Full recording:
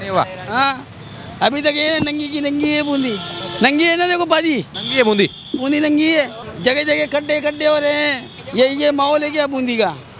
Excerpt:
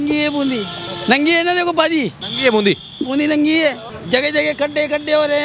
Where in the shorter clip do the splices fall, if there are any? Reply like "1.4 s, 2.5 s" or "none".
none